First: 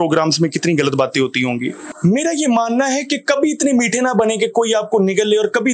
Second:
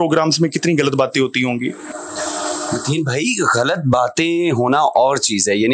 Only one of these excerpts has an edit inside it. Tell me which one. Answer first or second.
first